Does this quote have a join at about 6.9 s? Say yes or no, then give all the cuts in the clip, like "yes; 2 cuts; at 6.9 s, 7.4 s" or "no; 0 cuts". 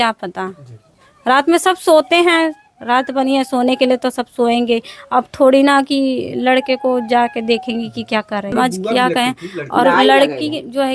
no; 1 cut; at 8.5 s